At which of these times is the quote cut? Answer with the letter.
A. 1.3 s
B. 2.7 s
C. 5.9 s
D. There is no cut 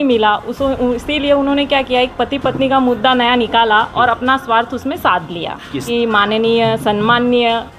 C